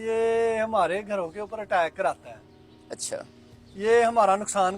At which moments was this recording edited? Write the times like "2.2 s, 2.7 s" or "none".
none